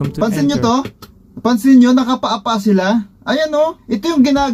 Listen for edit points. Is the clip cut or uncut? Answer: uncut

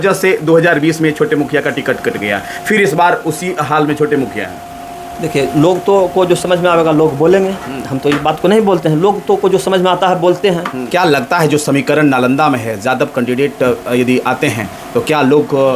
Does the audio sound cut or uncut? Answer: cut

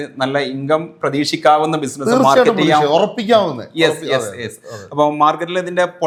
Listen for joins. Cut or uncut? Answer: uncut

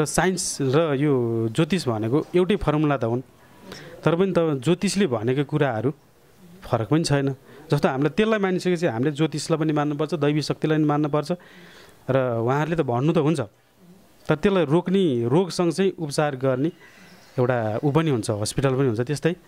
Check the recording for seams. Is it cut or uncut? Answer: uncut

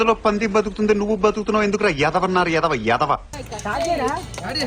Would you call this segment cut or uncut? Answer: uncut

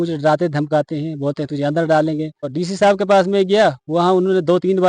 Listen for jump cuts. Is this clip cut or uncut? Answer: cut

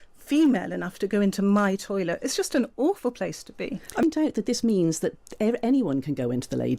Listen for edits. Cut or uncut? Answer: cut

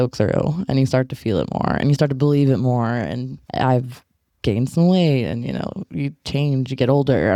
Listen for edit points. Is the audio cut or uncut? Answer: uncut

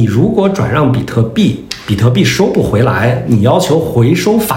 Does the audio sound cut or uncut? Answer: uncut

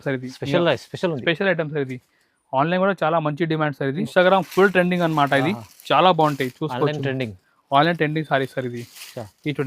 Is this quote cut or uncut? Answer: cut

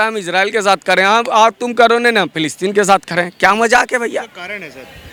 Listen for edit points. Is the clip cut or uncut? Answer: uncut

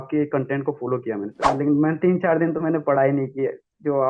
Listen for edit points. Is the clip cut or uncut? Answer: cut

